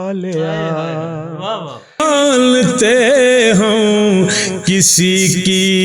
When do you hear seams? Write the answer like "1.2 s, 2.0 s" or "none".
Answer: 2.0 s